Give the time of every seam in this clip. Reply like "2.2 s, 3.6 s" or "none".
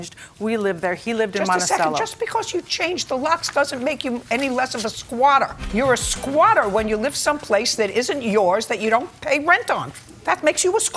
none